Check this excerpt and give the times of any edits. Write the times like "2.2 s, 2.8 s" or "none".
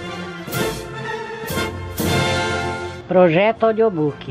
2.9 s